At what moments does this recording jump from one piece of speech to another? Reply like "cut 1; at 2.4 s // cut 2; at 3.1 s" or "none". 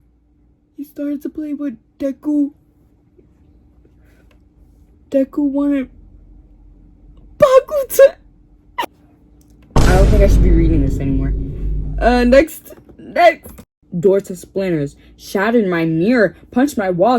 cut 1; at 8.8 s // cut 2; at 13.6 s